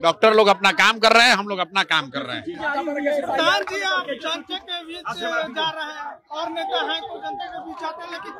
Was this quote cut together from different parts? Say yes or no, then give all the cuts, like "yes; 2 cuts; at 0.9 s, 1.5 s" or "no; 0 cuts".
no; 0 cuts